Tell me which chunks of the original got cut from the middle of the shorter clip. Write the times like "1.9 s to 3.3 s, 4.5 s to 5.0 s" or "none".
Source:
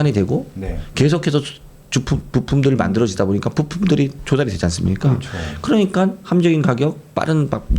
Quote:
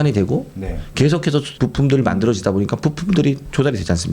1.5 s to 2.2 s

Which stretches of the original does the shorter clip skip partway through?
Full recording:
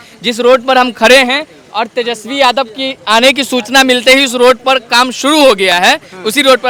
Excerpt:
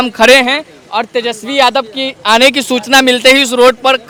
none

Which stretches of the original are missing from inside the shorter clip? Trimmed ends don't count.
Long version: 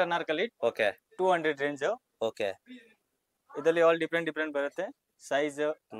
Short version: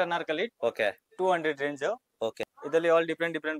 2.4 s to 3.3 s

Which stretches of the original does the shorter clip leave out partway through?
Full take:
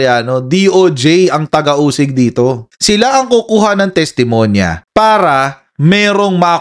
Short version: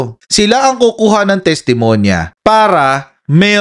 none

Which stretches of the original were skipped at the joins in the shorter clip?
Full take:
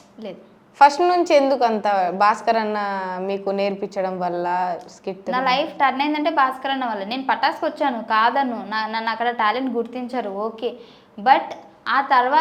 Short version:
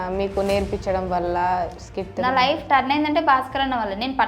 none

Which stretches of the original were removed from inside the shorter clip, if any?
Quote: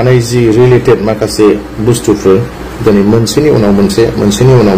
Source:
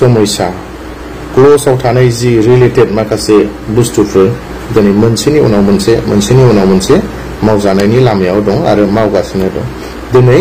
none

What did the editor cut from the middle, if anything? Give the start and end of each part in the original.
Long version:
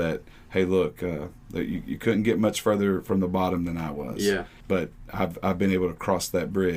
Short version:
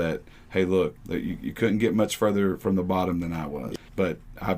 1.0 s to 1.4 s, 4.2 s to 4.4 s

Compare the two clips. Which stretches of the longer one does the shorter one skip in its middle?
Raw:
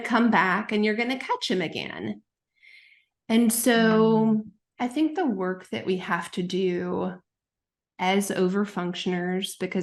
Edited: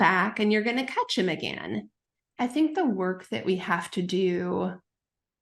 2.5 s to 4.6 s

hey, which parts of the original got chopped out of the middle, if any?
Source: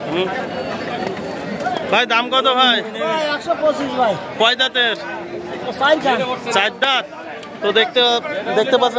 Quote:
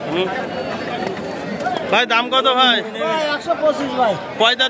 none

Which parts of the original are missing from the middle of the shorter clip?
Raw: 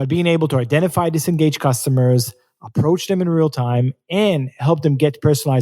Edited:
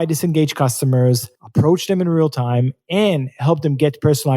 2.4 s to 2.6 s

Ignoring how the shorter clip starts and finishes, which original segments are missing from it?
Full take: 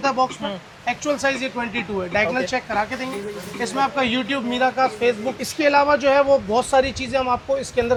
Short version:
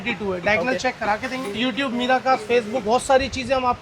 3.3 s to 4.1 s, 5.3 s to 6.5 s

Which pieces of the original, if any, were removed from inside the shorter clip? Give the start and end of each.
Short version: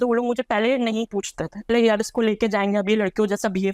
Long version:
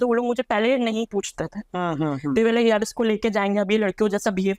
1.7 s to 2.5 s

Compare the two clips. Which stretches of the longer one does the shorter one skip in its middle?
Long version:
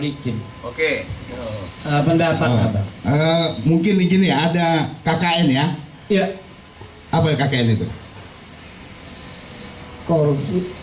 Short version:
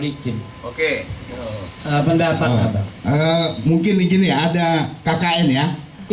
none

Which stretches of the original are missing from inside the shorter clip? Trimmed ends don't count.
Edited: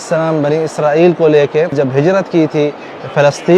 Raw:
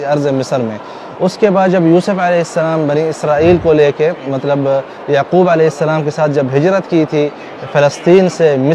4.2 s to 6.3 s

